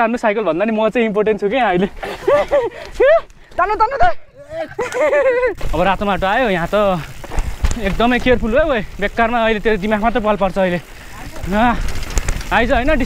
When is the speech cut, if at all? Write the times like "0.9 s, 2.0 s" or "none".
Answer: 5.6 s